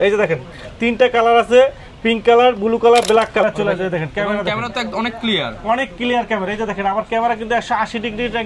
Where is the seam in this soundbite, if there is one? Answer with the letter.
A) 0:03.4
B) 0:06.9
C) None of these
A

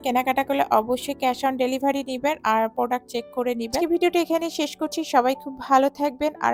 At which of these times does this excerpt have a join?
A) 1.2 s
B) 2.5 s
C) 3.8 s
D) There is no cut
D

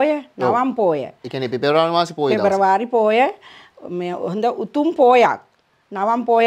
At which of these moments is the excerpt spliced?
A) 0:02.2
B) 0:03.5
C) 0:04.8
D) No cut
D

